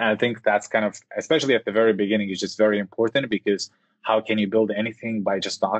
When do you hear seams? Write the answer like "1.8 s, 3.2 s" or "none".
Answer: none

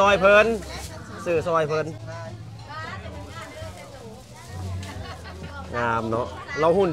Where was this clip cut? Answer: none

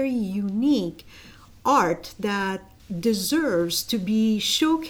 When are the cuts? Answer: none

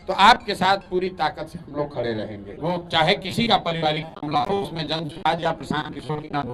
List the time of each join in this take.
2.4 s

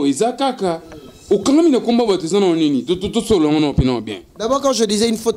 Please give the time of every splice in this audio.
none

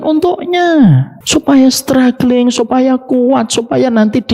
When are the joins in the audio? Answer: 1.1 s

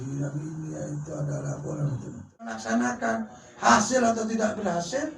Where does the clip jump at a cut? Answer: 2.6 s

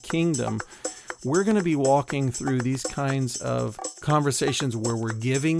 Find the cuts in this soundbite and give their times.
3.9 s

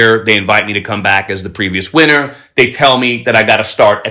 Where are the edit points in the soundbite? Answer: none

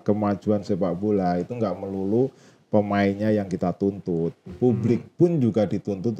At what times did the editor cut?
none

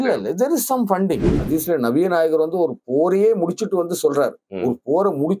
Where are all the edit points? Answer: 1.3 s

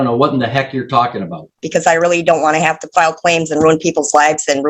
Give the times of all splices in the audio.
1.6 s

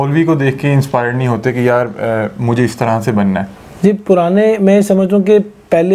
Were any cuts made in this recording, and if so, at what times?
3.6 s

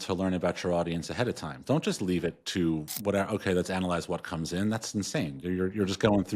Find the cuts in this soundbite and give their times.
2.9 s

